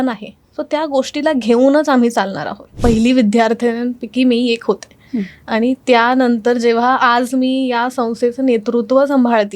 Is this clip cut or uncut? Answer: cut